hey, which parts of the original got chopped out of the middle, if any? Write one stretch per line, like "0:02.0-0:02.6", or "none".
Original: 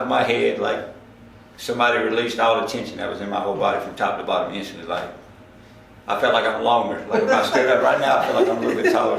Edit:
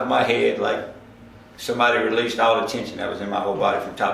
none